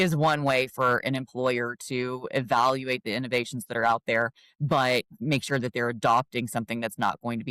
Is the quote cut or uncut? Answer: uncut